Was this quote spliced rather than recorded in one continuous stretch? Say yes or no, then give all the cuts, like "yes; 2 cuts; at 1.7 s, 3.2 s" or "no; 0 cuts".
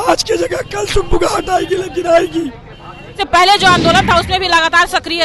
yes; 1 cut; at 3.2 s